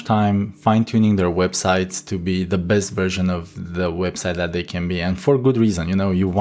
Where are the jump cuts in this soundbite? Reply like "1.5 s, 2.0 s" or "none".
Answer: none